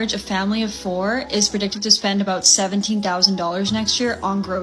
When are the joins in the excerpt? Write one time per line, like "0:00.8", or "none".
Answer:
none